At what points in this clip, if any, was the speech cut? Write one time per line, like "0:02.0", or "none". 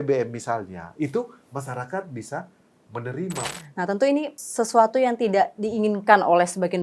0:03.5
0:04.4